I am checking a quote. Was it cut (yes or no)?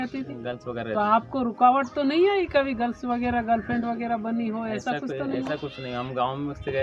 no